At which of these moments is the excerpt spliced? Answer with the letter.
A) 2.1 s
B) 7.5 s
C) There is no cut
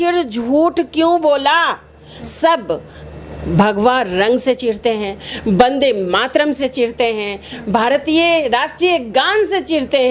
A